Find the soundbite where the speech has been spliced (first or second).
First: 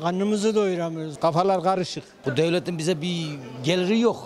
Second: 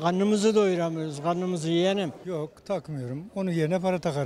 first